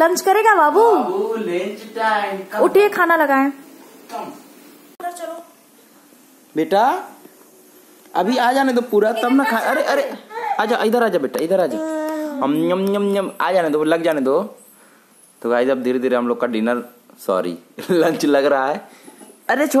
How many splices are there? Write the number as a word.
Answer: zero